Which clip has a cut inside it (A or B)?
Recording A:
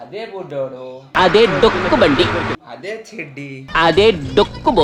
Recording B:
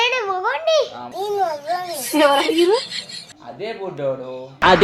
B